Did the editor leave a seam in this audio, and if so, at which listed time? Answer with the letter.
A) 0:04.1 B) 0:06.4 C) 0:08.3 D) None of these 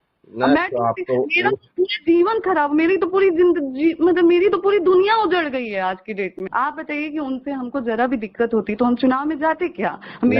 B